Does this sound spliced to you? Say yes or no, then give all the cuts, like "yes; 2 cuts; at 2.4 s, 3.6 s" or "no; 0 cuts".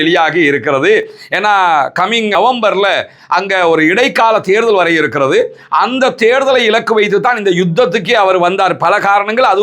no; 0 cuts